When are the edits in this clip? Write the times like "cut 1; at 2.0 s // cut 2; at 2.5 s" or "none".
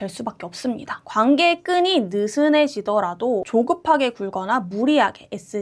cut 1; at 1.0 s // cut 2; at 3.5 s